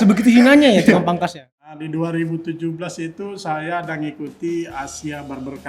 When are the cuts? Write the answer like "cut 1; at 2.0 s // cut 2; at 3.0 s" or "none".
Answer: cut 1; at 1.8 s